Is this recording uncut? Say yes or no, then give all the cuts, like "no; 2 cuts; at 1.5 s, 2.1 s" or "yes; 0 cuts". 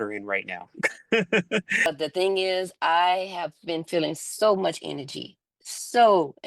no; 1 cut; at 1.9 s